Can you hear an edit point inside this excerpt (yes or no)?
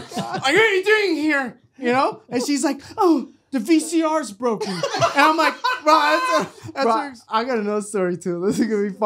yes